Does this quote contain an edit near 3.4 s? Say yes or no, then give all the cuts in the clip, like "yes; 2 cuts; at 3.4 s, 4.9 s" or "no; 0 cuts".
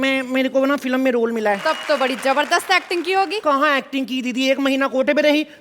yes; 2 cuts; at 1.6 s, 3.4 s